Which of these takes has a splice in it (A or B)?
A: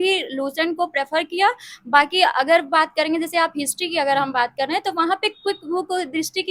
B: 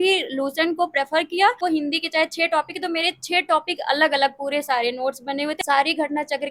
B